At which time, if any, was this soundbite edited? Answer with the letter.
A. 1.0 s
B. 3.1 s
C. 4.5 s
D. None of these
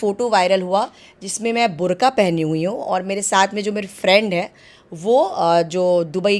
D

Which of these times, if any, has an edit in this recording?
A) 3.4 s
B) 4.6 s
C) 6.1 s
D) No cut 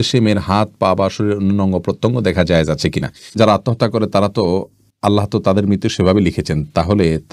A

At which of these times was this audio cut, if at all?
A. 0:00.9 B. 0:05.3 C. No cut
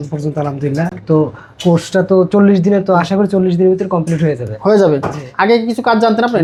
C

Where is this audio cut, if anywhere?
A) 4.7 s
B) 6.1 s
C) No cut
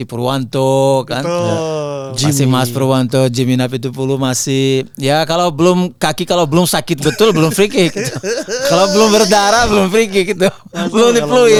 C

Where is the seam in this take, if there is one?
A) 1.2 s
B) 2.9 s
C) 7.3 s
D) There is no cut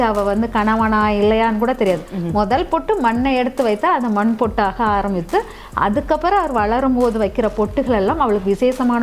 D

